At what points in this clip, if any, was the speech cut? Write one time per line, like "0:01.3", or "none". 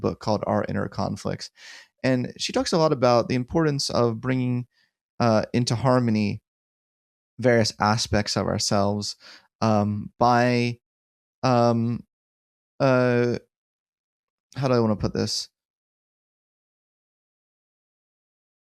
none